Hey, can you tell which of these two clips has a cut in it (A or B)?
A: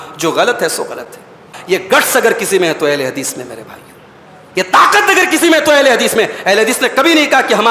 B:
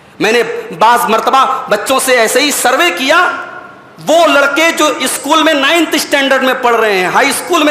A